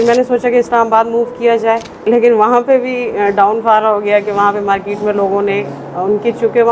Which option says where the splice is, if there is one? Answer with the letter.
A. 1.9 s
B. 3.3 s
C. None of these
A